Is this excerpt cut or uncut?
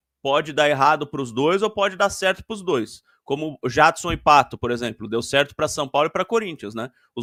uncut